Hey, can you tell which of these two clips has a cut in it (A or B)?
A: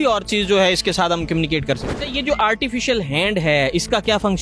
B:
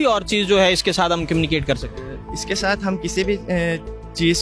A